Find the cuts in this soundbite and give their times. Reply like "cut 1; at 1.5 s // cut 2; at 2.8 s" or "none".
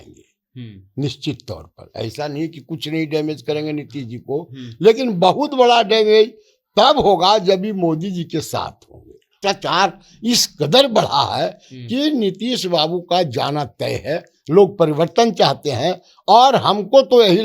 cut 1; at 9.3 s